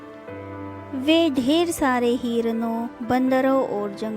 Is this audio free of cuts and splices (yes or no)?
no